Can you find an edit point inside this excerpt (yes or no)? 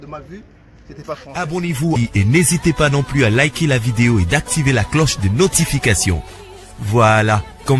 yes